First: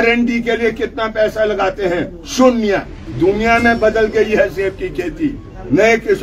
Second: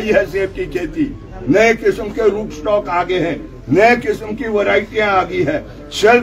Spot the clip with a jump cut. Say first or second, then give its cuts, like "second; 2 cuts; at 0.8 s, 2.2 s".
first; 1 cut; at 3.0 s